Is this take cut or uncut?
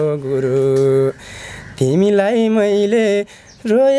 uncut